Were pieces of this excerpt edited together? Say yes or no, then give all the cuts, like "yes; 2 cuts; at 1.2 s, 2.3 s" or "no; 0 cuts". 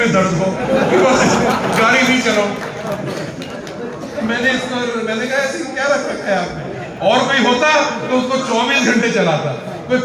no; 0 cuts